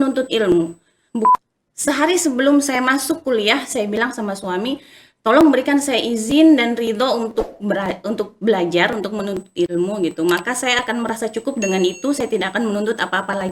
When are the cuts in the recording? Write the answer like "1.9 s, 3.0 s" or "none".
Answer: 1.3 s